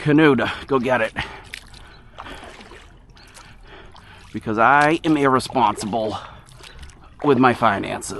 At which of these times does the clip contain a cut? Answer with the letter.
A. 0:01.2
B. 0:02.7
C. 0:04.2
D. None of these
D